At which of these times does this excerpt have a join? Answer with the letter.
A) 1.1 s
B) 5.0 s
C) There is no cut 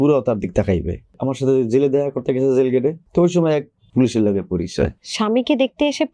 A